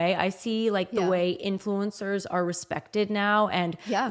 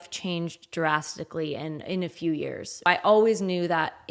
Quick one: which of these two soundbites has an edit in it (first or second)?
second